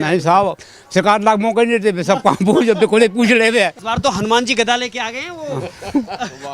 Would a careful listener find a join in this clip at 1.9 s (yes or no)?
no